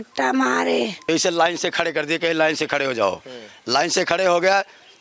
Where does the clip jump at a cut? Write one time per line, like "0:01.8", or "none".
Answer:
0:01.0

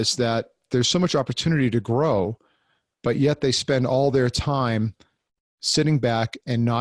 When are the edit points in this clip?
none

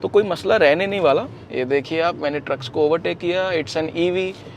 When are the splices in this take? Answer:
0:01.4

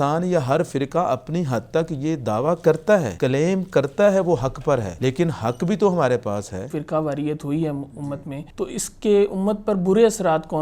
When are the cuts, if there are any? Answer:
0:03.1
0:04.9
0:06.8
0:08.4

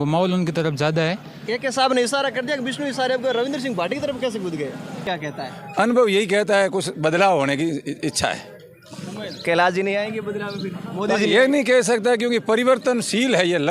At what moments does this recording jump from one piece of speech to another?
0:05.0

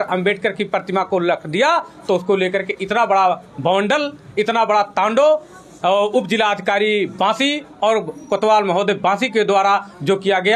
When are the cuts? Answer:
none

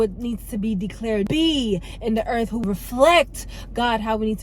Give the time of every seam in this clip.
0:01.3
0:02.6

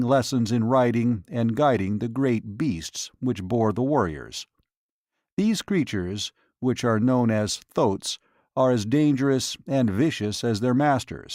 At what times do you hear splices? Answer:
none

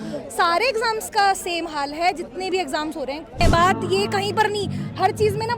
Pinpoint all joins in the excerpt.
0:03.4

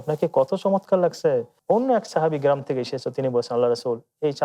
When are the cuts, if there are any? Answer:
0:01.5

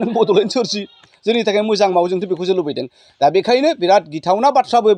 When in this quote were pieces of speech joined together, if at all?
none

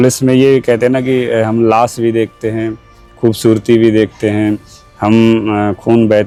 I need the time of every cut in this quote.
none

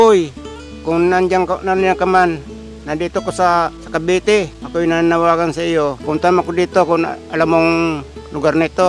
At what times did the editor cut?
0:03.8
0:04.6
0:06.0

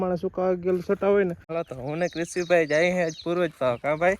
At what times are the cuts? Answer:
0:01.5

